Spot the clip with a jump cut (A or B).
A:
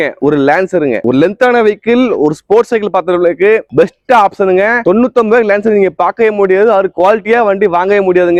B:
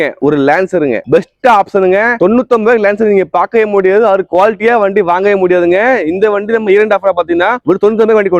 B